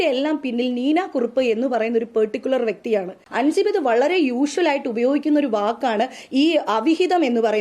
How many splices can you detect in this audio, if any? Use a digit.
1